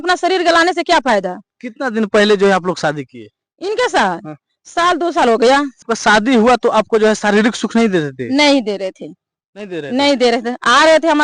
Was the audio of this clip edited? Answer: yes; 1 cut; at 5.8 s

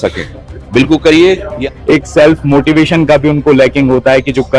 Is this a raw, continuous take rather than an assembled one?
no; 1 cut; at 1.5 s

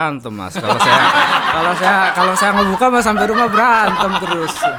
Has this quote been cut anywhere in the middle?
no; 0 cuts

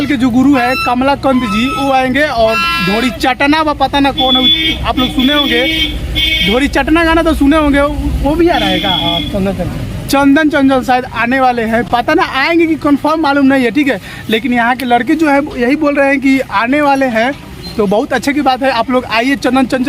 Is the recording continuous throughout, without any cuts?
yes; 0 cuts

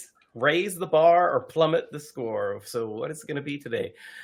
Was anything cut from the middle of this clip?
no; 0 cuts

